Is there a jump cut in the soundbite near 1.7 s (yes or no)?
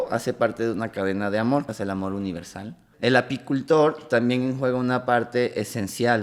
yes